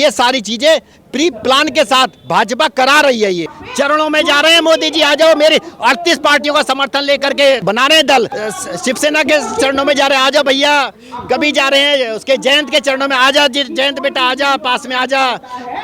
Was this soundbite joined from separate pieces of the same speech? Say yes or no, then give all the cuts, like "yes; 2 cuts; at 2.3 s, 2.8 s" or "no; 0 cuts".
yes; 2 cuts; at 3.6 s, 8.2 s